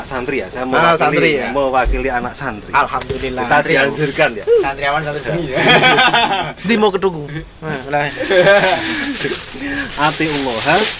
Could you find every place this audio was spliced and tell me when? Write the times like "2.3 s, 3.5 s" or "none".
none

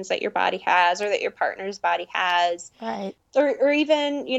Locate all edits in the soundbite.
3.1 s

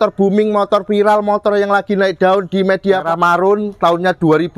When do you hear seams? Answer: 3.1 s

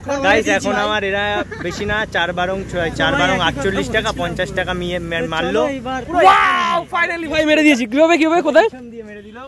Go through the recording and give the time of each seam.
none

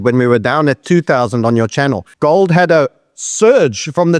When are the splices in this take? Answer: none

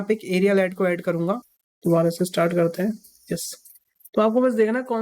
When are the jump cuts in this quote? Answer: 1.4 s

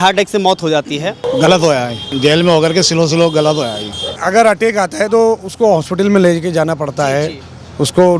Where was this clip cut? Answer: 1.3 s, 2.1 s, 4.2 s

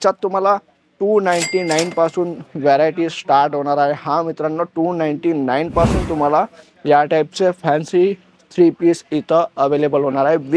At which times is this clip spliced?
none

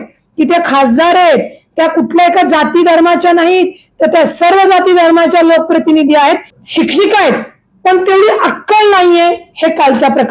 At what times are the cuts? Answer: 6.5 s

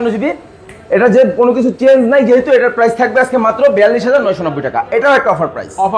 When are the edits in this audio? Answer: none

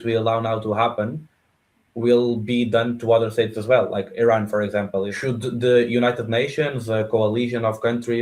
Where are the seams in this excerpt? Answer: 5.1 s

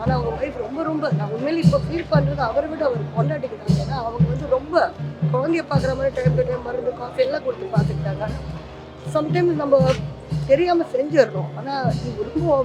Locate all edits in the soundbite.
none

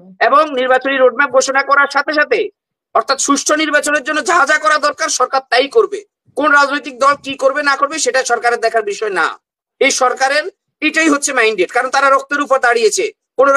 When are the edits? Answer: none

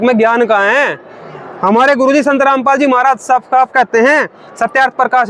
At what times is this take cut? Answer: none

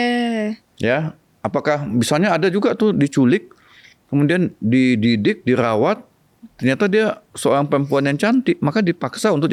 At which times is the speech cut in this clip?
none

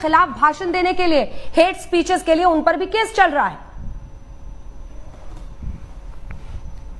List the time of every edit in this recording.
none

